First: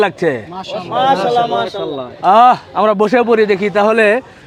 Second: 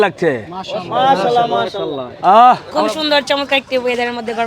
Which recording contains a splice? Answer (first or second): second